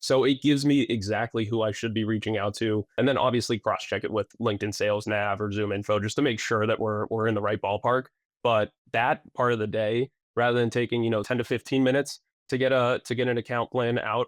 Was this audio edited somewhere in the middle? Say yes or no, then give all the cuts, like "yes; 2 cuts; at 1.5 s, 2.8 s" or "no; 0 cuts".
yes; 2 cuts; at 3.0 s, 11.3 s